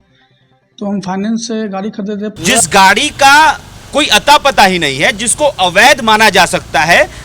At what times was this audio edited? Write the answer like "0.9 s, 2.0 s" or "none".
2.3 s